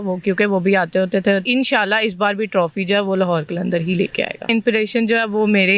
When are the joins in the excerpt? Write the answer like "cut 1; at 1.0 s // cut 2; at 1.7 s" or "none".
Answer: cut 1; at 1.4 s // cut 2; at 4.4 s